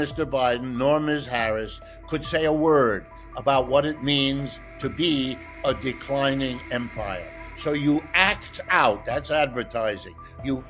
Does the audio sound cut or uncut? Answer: uncut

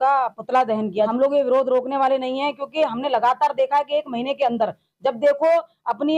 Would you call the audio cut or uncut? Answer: cut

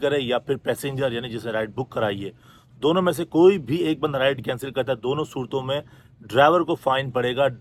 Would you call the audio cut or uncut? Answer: uncut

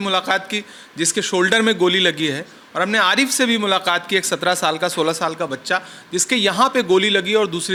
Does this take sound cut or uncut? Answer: uncut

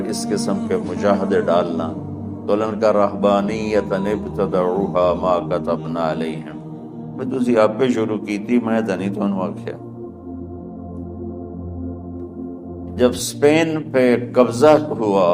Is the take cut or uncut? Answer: cut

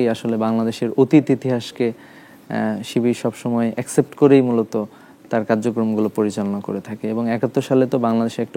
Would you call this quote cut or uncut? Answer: uncut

